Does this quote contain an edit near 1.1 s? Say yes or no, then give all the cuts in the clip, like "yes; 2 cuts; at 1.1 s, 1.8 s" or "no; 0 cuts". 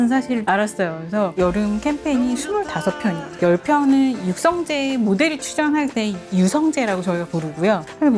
yes; 1 cut; at 1.1 s